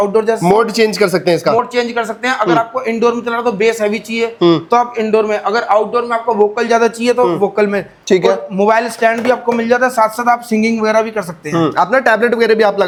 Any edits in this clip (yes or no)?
no